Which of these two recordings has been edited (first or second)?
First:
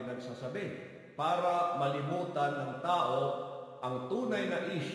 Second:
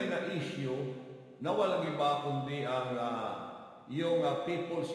first